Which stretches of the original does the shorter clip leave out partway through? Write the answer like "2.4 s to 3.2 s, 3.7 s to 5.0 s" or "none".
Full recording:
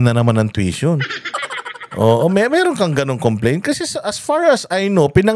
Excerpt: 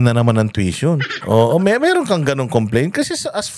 1.1 s to 1.8 s